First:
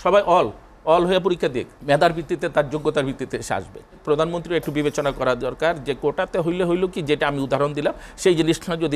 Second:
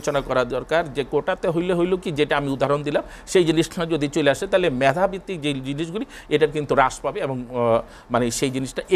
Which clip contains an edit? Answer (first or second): first